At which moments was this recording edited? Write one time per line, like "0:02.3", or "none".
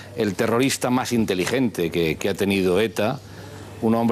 none